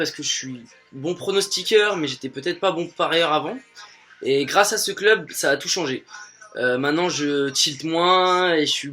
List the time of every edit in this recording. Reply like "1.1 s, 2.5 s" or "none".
none

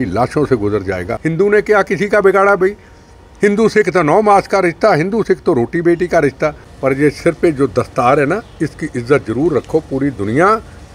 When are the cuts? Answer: 1.1 s, 6.7 s

